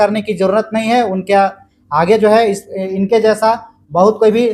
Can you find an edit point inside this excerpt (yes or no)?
no